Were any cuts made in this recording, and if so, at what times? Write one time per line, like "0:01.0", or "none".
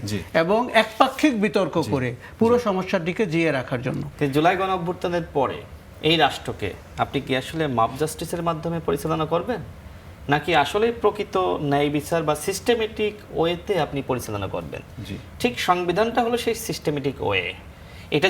0:04.0